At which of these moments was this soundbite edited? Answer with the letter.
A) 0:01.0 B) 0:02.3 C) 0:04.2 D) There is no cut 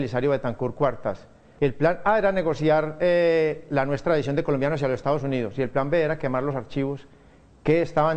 D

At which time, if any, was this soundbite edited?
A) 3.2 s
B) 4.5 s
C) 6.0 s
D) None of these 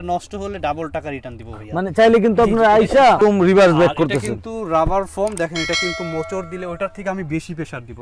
D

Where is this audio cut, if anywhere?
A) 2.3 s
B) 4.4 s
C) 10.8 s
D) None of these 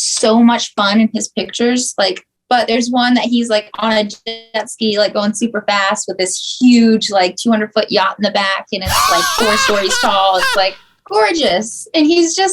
A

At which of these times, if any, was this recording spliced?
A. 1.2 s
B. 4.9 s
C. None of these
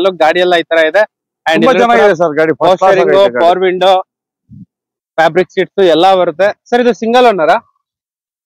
C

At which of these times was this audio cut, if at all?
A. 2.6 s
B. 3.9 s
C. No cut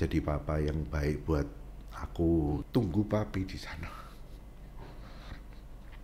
A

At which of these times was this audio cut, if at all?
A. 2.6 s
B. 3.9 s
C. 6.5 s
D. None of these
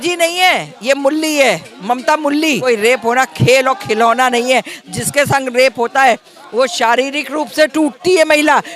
A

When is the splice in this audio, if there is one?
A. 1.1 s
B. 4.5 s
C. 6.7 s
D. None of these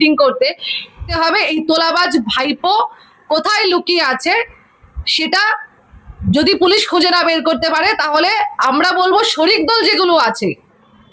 A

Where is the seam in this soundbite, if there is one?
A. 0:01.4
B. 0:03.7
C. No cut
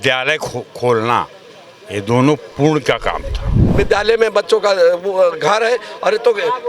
B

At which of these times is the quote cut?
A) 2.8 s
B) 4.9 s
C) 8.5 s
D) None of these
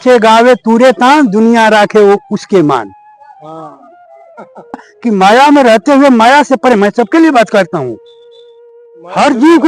B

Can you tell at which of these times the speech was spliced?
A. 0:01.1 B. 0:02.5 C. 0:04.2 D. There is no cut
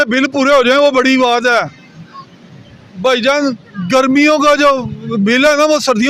D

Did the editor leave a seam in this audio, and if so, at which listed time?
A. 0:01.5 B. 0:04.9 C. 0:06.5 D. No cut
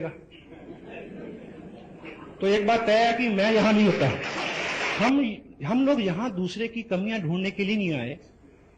B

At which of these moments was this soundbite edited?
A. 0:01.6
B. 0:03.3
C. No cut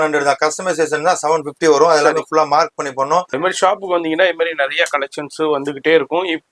B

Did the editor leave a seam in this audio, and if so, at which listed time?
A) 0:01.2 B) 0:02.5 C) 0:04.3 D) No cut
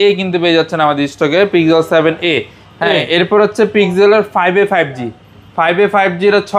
D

